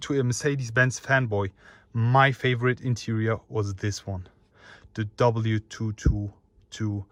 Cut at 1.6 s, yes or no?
no